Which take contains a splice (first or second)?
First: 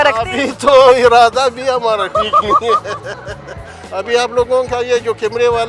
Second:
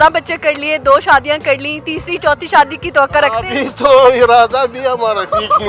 first